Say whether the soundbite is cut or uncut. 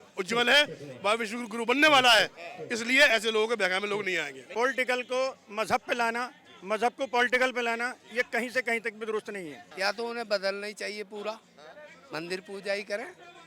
cut